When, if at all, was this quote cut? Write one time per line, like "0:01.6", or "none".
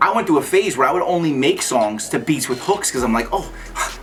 none